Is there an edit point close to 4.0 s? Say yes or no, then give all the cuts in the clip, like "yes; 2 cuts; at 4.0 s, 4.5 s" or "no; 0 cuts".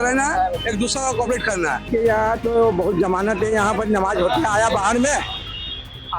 no; 1 cut; at 1.9 s